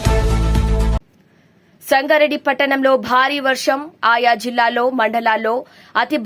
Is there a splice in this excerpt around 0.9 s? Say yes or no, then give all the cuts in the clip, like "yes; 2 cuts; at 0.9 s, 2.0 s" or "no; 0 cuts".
yes; 1 cut; at 0.9 s